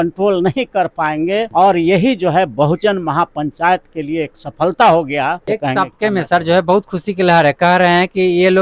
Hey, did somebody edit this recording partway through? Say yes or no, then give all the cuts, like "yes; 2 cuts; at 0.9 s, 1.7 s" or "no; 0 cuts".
yes; 2 cuts; at 1.5 s, 5.4 s